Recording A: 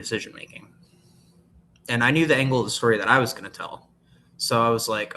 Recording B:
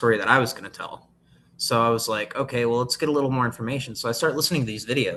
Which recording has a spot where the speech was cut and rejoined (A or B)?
A